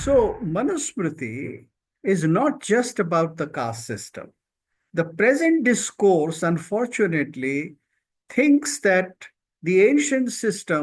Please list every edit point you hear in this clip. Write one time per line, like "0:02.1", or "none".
none